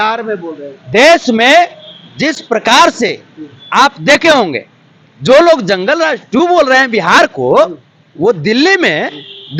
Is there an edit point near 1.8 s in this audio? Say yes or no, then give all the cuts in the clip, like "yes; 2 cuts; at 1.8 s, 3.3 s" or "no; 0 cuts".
no; 0 cuts